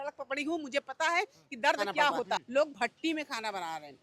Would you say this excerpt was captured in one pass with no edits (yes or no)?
no